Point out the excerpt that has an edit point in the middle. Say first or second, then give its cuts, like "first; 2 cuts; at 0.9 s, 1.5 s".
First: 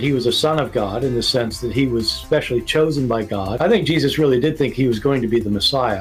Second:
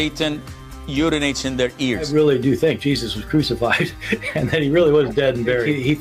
second; 1 cut; at 4.2 s